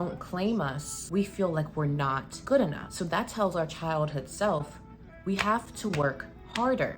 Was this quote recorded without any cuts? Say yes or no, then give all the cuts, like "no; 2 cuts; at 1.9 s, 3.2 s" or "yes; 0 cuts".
no; 3 cuts; at 0.9 s, 2.3 s, 2.8 s